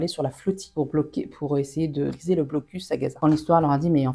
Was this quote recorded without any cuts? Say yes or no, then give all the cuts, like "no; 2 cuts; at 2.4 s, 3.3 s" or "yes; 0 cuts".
no; 1 cut; at 3.2 s